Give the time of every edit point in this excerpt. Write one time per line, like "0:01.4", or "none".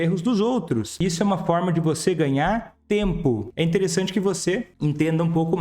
0:00.9
0:02.7
0:03.5
0:04.7